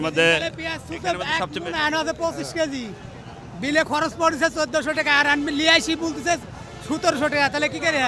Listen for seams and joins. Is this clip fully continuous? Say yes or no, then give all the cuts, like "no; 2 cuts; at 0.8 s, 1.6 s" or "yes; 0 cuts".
yes; 0 cuts